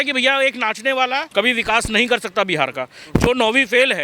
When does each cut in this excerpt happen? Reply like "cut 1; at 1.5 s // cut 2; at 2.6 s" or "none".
cut 1; at 1.3 s